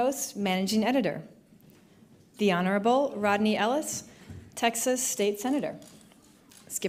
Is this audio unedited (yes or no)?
yes